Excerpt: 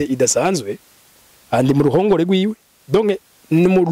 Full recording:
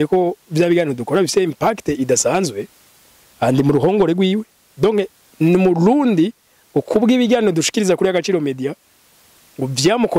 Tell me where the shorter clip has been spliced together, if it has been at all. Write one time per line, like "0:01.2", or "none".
none